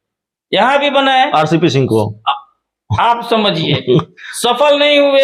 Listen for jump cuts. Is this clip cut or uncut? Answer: uncut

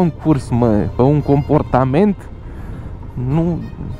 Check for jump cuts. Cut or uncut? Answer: uncut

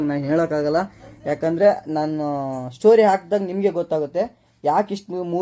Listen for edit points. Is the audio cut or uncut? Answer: uncut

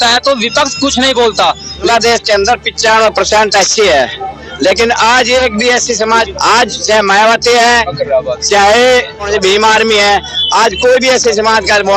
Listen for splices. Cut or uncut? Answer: cut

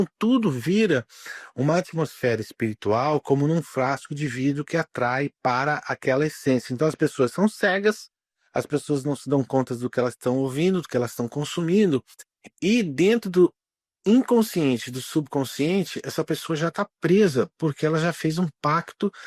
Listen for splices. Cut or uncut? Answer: uncut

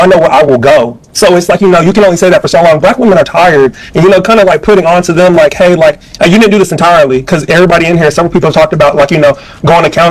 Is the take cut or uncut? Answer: uncut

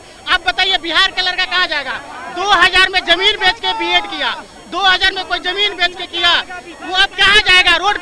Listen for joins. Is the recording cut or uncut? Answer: uncut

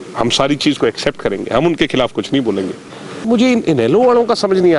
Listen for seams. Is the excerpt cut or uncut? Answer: cut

